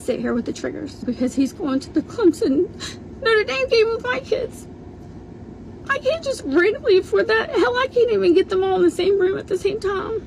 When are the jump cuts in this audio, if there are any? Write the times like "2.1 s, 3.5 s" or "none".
1.0 s